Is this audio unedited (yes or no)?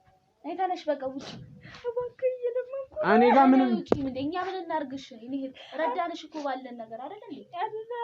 yes